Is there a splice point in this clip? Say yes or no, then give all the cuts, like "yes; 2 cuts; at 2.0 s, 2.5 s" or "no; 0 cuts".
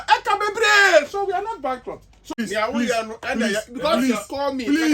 yes; 1 cut; at 2.3 s